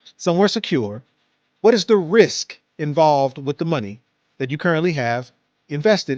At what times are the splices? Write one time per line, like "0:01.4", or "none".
none

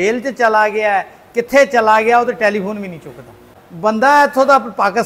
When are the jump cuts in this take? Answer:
0:03.5

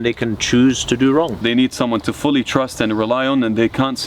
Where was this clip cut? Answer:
0:01.4

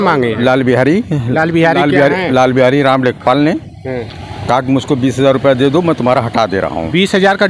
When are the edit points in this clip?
none

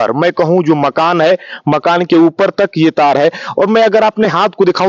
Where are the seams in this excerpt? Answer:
none

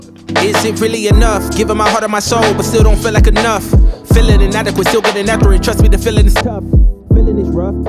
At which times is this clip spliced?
0:05.4

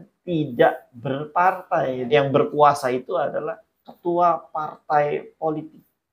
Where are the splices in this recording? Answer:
0:02.1

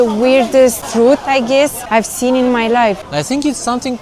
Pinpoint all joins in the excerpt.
0:00.8
0:01.8
0:03.0

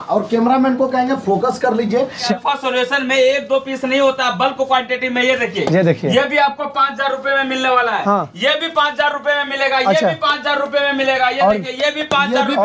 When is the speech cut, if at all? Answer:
0:02.3

